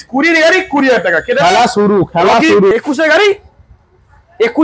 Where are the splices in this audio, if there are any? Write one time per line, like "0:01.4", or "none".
0:02.7